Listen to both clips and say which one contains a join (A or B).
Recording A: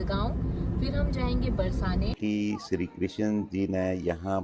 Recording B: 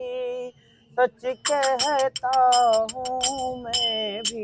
A